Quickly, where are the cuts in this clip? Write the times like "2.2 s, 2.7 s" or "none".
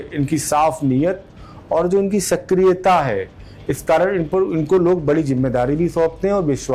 none